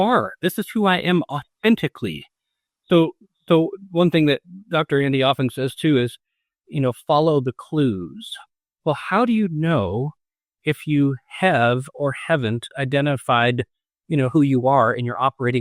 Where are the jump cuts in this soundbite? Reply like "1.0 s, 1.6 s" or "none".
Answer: none